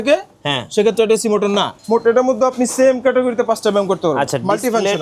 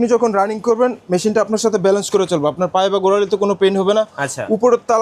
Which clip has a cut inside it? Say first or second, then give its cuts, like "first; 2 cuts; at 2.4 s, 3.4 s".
first; 1 cut; at 1.7 s